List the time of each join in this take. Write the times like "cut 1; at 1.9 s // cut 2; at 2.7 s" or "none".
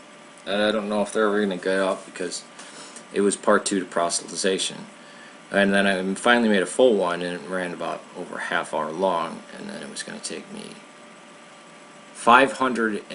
none

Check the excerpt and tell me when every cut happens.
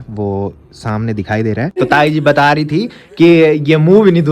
cut 1; at 1.8 s

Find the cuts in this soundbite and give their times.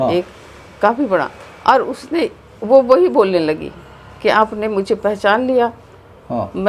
none

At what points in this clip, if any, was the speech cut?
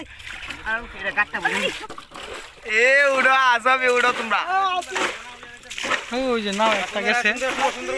cut 1; at 1.8 s

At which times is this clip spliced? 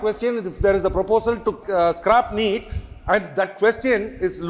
none

